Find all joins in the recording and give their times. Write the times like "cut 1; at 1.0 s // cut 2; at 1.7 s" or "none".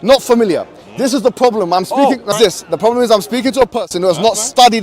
cut 1; at 2.4 s